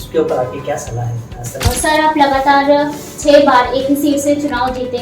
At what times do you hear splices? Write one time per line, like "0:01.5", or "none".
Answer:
0:01.5